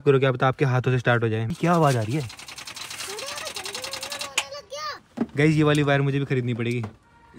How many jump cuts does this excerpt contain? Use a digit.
2